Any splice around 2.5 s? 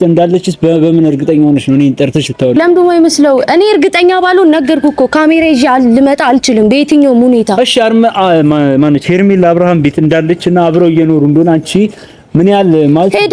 yes; 1 cut; at 2.5 s

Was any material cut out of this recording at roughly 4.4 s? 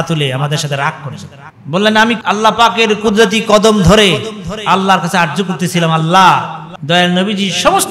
no; 1 cut; at 2.2 s

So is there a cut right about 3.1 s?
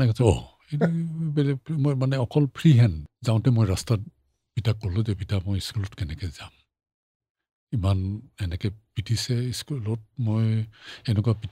yes; 1 cut; at 3.1 s

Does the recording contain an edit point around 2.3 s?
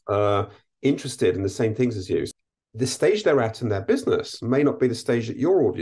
yes; 1 cut; at 2.3 s

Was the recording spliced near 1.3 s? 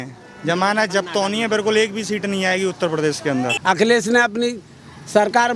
no; 1 cut; at 3.5 s

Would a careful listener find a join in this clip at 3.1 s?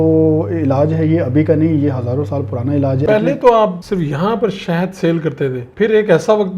yes; 3 cuts; at 3.1 s, 3.8 s, 5.6 s

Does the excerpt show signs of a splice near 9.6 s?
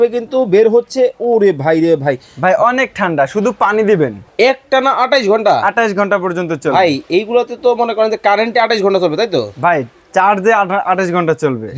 no; 1 cut; at 4.2 s

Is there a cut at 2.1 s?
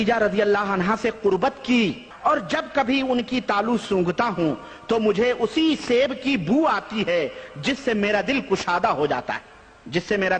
yes; 1 cut; at 2.1 s

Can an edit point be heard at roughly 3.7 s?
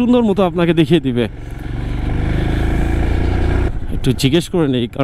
yes; 1 cut; at 3.7 s

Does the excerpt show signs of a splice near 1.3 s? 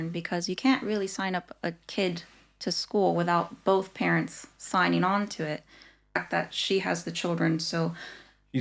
no; 1 cut; at 6.2 s

